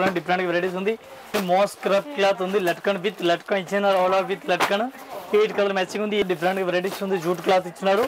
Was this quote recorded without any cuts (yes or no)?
no